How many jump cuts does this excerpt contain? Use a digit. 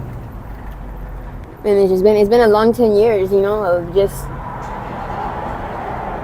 1